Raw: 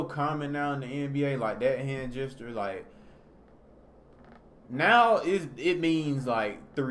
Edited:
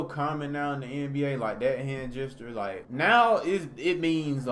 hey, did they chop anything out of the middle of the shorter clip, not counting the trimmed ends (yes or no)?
yes